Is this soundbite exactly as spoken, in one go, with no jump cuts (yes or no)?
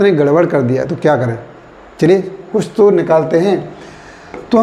yes